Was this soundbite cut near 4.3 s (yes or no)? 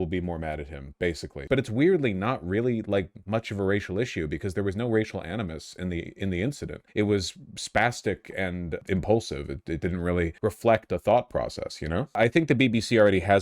no